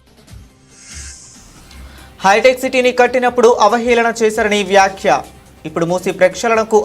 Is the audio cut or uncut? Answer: uncut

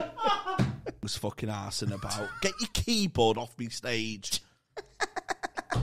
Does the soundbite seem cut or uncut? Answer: cut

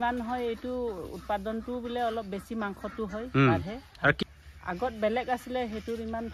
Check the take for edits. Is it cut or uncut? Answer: cut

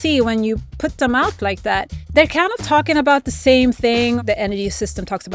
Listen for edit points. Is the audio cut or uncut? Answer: cut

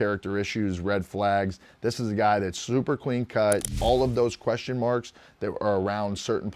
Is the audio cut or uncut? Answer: cut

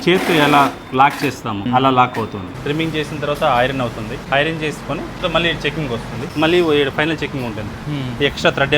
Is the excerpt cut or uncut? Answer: cut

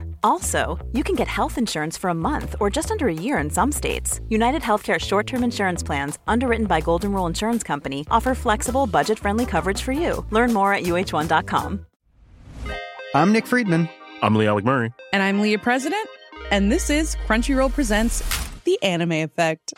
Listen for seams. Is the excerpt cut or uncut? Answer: cut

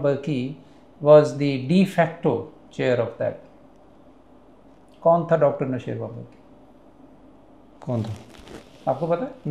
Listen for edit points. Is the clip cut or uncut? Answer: uncut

